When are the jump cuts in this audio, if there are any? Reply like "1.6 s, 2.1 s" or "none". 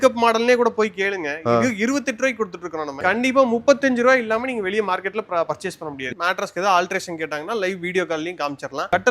2.9 s, 6.1 s